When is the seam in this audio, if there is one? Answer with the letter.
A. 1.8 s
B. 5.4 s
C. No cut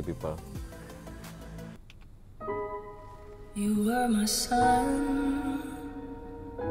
A